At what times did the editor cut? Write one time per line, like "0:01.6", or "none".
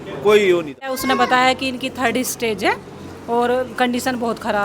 0:01.0

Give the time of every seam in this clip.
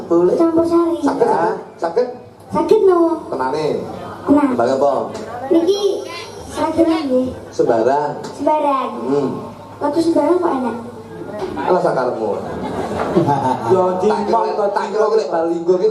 0:04.5

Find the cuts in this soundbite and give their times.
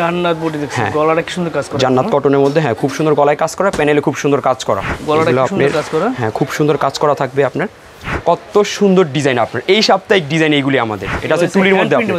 0:04.9
0:08.2
0:11.1

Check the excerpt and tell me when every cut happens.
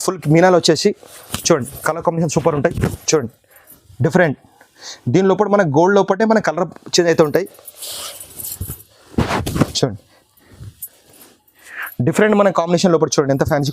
none

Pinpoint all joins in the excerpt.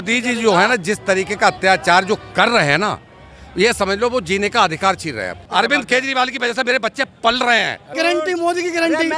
0:05.5
0:07.9

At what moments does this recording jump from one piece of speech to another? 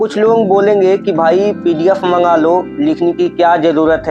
none

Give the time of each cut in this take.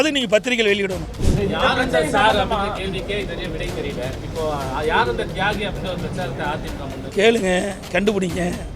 0:01.1
0:07.0

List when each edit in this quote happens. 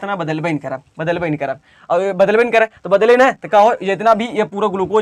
none

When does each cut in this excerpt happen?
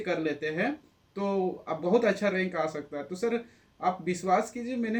none

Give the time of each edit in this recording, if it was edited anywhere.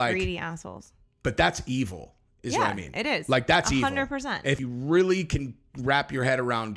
0:04.6

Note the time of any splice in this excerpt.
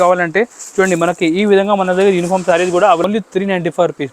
0:03.0

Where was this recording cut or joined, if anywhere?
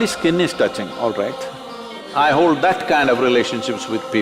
0:02.0

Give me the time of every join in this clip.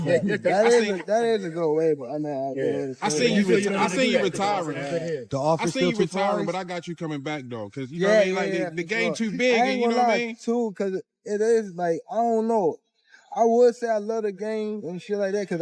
none

